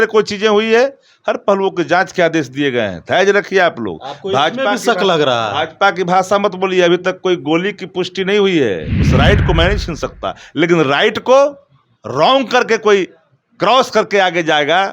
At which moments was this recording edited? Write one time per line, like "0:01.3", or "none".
0:09.0